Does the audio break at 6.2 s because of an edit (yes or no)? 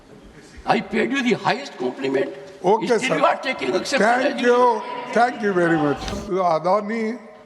yes